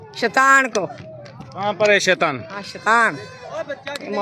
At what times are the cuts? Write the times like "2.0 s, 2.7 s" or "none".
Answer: none